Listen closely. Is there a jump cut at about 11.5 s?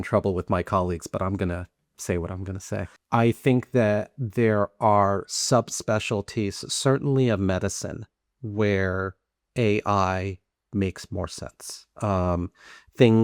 no; 1 cut; at 2.9 s

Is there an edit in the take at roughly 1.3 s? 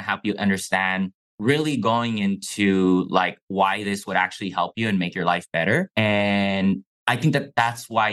yes; 2 cuts; at 1.3 s, 5.9 s

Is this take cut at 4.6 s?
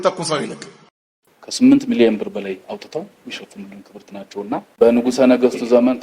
yes; 2 cuts; at 1.5 s, 4.6 s

